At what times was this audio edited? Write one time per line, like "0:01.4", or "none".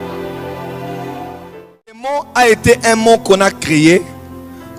0:02.3